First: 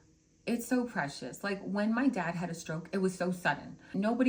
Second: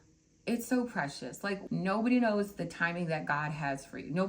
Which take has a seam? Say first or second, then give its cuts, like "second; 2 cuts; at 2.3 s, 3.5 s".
second; 1 cut; at 1.6 s